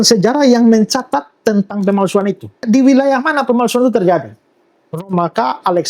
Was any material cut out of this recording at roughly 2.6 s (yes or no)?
yes